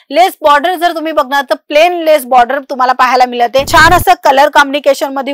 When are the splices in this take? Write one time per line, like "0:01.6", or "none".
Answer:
0:03.7